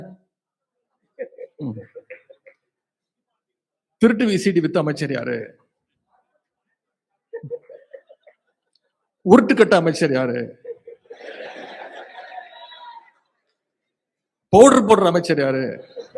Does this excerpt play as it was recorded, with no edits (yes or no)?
yes